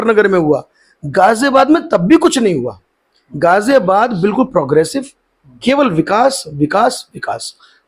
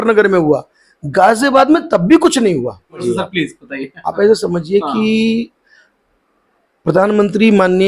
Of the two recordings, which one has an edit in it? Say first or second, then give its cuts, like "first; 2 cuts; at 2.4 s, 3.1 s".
second; 1 cut; at 3.0 s